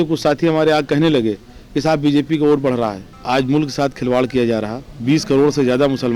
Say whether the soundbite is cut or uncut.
cut